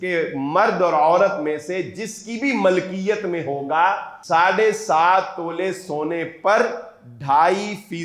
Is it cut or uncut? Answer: cut